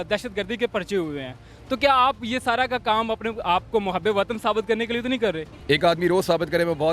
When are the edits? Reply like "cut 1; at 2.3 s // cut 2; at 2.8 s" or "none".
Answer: cut 1; at 5.5 s